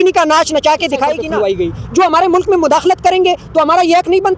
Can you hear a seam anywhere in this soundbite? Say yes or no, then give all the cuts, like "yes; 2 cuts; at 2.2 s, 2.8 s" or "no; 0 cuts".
yes; 1 cut; at 1.2 s